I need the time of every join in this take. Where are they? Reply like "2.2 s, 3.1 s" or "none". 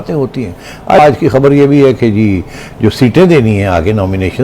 1.0 s